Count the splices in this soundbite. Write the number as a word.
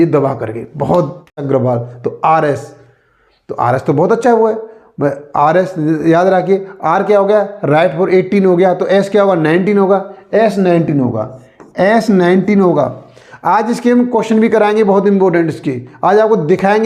one